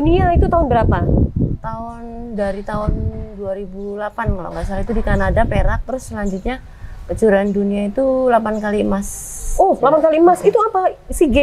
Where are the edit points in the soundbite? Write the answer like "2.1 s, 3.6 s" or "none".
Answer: none

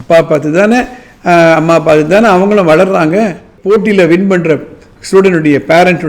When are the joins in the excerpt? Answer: 3.5 s

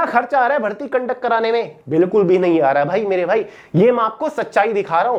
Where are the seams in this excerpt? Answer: none

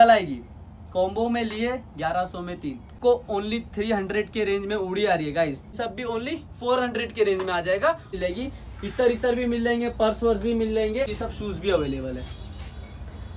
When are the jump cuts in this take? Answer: 3.0 s, 5.8 s, 8.1 s, 11.1 s

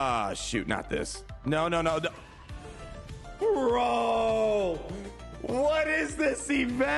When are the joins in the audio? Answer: none

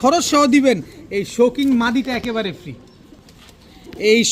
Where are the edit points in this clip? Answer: none

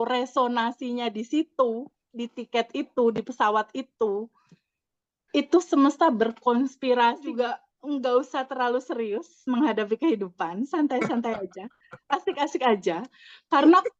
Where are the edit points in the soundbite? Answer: 7.3 s

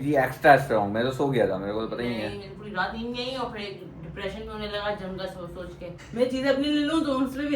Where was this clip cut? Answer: 6.0 s

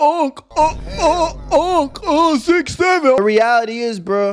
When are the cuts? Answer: 3.2 s

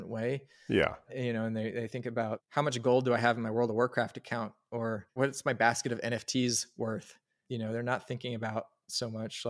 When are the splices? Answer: 1.1 s, 5.0 s

